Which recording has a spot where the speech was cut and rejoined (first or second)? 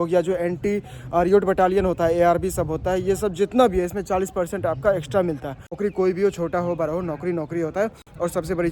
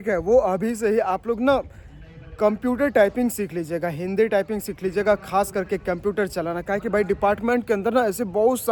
first